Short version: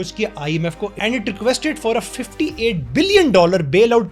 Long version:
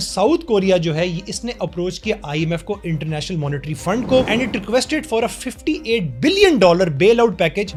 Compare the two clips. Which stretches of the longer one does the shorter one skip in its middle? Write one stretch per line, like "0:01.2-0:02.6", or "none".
0:02.9-0:04.3